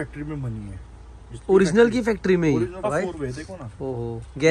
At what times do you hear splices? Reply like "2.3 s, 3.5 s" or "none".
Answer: 2.9 s